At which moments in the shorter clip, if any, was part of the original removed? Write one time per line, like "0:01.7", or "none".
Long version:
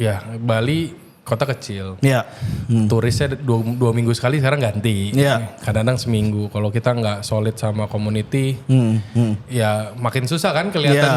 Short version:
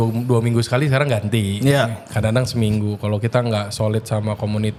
none